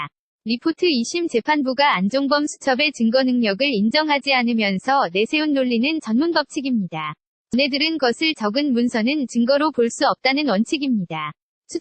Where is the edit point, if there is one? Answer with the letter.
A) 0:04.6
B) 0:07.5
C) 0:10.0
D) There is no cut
B